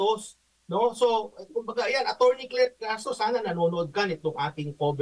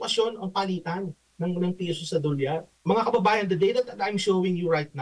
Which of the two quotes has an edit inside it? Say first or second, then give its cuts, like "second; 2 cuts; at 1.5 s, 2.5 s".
second; 1 cut; at 2.7 s